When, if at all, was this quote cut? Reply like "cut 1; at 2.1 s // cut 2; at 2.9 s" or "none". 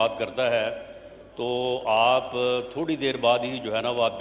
none

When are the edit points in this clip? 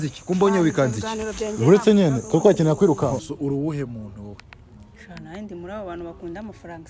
cut 1; at 3.3 s

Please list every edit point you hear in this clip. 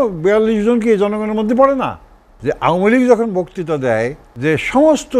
cut 1; at 2.3 s // cut 2; at 4.2 s

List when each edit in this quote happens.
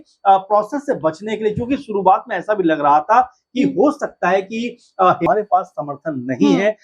cut 1; at 5.3 s

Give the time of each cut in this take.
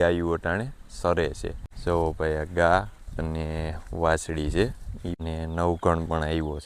none

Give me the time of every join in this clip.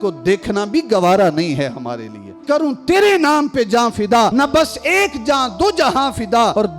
cut 1; at 2.4 s

